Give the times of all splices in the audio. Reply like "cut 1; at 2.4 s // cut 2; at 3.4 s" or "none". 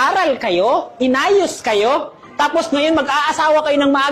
cut 1; at 0.9 s